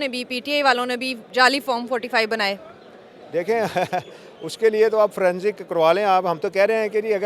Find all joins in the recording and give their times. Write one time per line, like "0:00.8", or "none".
none